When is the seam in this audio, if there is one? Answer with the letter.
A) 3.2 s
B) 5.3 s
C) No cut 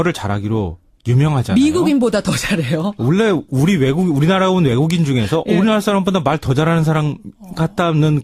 B